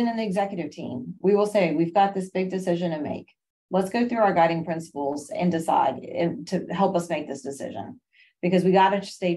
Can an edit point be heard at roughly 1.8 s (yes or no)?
no